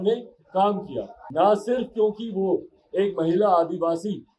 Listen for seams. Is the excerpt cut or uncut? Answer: cut